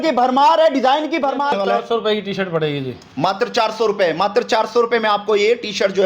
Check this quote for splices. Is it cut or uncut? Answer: cut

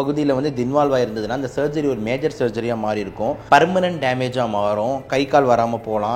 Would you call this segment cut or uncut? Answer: cut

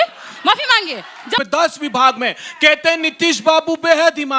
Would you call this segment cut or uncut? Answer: cut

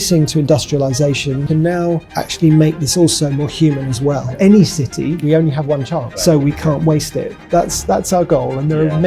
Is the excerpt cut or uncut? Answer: cut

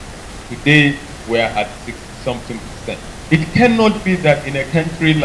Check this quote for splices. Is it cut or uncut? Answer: cut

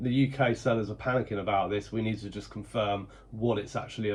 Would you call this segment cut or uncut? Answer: uncut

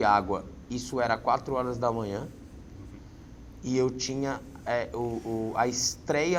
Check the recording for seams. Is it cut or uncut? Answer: uncut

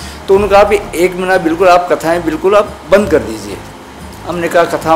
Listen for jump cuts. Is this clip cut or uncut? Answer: uncut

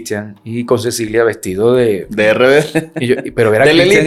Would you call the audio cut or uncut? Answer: uncut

